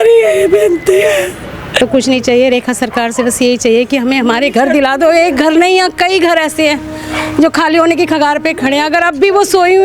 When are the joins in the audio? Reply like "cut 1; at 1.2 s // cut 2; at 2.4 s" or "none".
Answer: cut 1; at 1.8 s